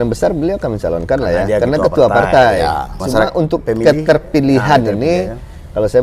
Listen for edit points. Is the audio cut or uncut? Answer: cut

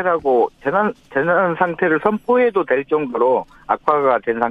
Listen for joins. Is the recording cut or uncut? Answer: cut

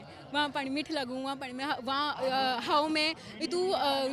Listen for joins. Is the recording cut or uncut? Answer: uncut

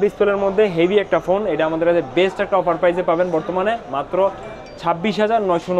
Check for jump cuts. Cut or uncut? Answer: uncut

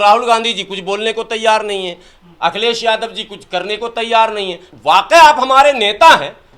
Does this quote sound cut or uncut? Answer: cut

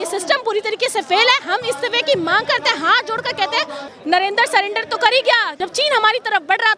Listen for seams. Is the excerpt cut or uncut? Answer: cut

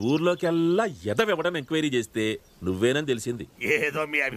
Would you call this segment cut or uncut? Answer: uncut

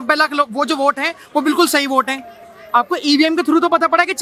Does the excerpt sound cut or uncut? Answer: uncut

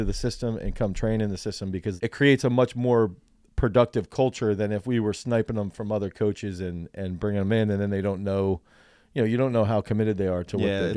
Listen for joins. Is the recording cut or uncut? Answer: cut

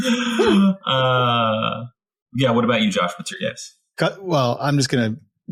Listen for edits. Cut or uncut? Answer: uncut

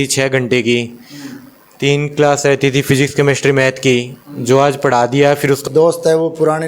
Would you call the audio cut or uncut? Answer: cut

